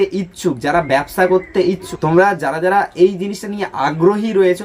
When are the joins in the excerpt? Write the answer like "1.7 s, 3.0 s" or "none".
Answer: 1.9 s

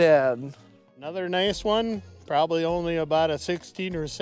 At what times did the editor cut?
1.1 s

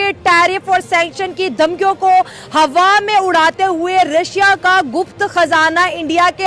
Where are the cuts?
none

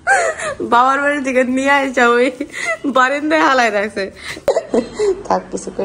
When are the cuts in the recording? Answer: 4.5 s

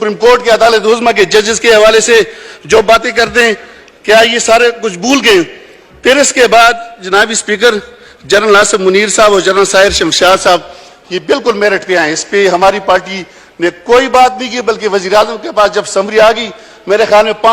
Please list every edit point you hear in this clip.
none

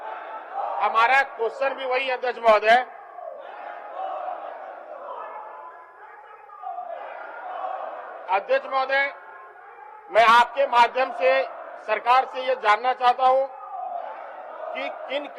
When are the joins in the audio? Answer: none

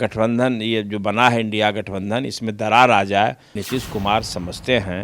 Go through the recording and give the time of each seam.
3.6 s

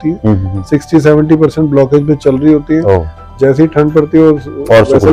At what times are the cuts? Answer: none

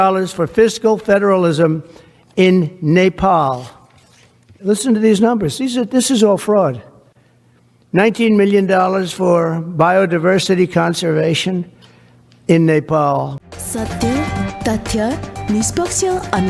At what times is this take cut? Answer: 13.3 s

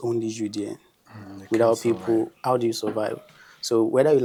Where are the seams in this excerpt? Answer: none

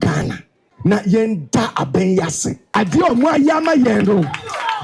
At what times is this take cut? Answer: 1.0 s, 2.7 s

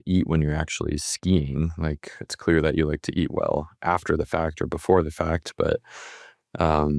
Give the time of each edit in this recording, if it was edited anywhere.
none

